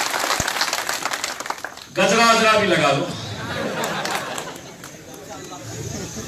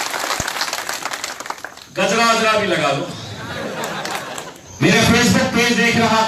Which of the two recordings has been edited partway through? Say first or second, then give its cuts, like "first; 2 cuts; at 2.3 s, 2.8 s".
second; 1 cut; at 4.6 s